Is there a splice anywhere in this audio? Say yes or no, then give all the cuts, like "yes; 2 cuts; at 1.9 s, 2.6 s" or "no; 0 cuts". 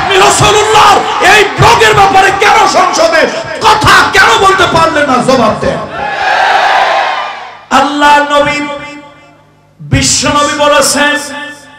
yes; 1 cut; at 7.5 s